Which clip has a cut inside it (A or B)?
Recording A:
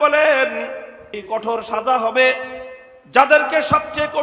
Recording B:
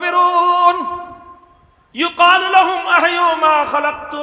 A